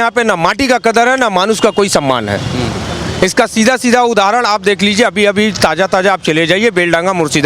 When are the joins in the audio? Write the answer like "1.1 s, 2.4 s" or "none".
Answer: none